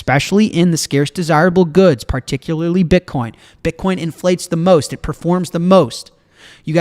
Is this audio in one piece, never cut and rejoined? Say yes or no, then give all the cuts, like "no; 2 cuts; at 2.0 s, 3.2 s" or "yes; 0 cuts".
yes; 0 cuts